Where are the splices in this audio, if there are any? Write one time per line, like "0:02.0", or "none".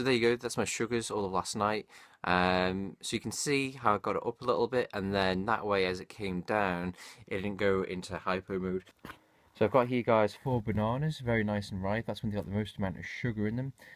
0:03.7